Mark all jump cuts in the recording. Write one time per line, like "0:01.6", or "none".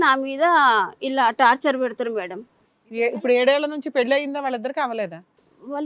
none